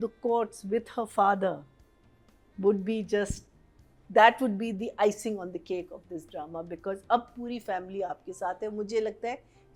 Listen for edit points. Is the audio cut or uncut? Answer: uncut